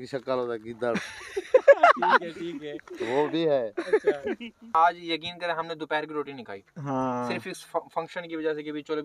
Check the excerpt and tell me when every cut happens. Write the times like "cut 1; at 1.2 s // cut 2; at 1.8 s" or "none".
cut 1; at 4.7 s